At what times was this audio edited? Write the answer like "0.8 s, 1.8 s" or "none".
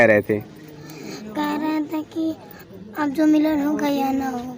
none

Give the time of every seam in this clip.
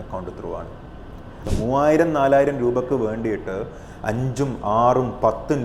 1.5 s

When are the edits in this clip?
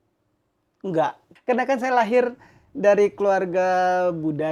1.3 s

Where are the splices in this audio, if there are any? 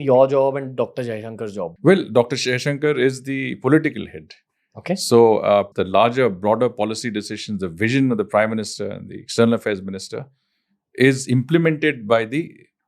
1.7 s, 5.7 s

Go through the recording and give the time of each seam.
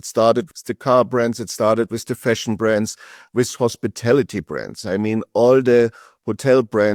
none

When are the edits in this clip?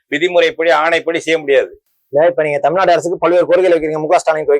none

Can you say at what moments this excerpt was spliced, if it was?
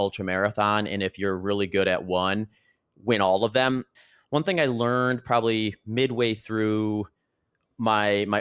3.9 s

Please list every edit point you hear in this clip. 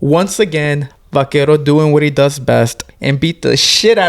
0.9 s, 2.9 s

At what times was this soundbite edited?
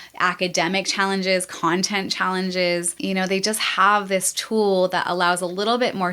2.9 s

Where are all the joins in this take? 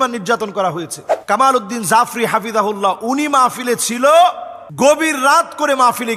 none

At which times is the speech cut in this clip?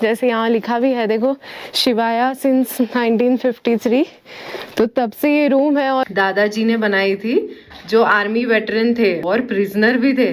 6.0 s, 9.2 s

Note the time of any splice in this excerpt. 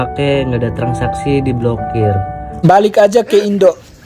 2.6 s

